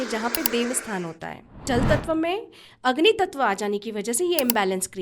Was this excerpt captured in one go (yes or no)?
no